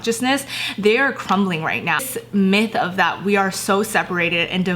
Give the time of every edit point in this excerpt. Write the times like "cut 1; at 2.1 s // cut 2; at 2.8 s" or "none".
cut 1; at 2.0 s